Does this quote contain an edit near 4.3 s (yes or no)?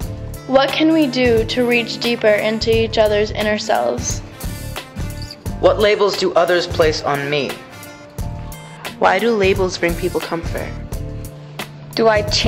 no